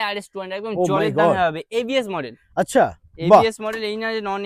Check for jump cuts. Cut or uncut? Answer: uncut